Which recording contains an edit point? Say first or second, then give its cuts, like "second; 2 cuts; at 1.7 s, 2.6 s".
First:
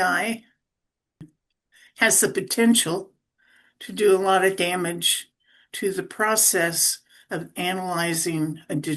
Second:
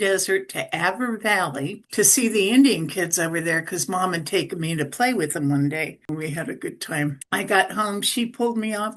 second; 2 cuts; at 1.8 s, 6.1 s